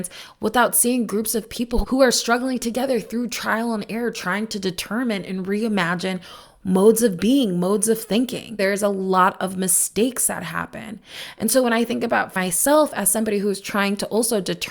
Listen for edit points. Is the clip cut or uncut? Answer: cut